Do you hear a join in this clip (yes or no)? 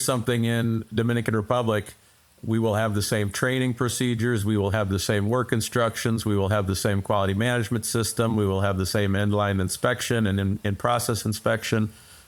no